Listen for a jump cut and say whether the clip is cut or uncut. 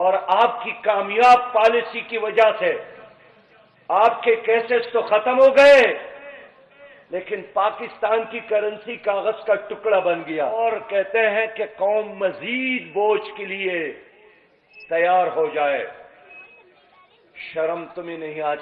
cut